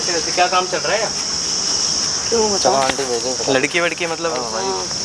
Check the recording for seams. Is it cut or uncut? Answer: uncut